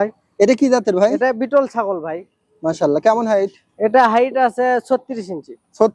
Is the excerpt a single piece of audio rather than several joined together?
yes; 0 cuts

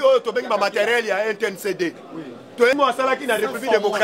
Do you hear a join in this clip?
yes; 1 cut; at 2.8 s

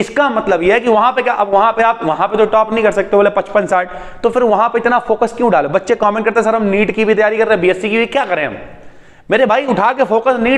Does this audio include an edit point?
no; 0 cuts

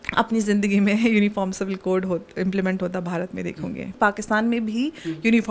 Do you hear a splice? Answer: yes; 1 cut; at 3.9 s

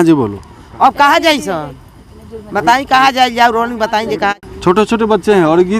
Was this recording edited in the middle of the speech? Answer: yes; 1 cut; at 4.4 s

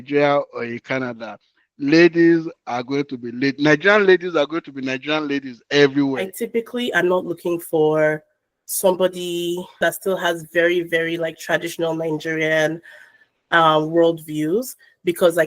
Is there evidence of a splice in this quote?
yes; 2 cuts; at 6.2 s, 9.8 s

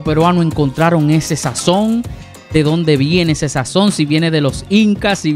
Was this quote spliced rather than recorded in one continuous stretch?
no; 0 cuts

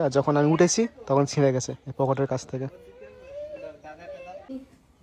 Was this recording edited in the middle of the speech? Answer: no; 0 cuts

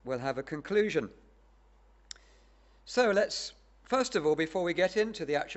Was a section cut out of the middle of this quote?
yes; 1 cut; at 2.5 s

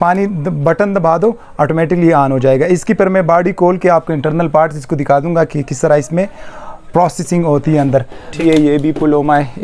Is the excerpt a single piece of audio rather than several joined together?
no; 1 cut; at 8.3 s

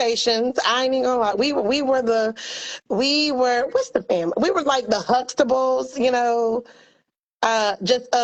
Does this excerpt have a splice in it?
no; 0 cuts

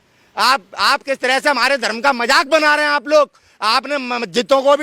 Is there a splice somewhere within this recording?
no; 0 cuts

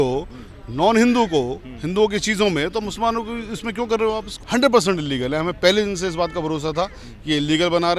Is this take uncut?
no; 1 cut; at 4.3 s

